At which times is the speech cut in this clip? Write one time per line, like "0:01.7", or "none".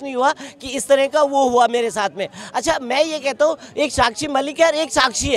none